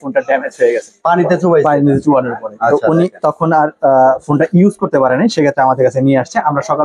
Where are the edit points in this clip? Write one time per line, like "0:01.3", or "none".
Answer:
none